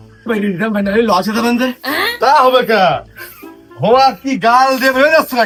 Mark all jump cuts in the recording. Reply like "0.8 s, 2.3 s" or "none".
none